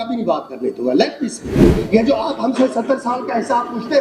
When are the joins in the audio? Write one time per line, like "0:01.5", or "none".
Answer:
0:01.7